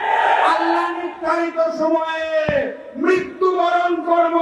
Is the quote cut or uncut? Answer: uncut